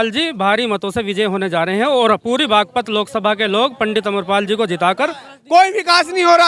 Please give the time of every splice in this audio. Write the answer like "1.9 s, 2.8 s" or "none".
5.2 s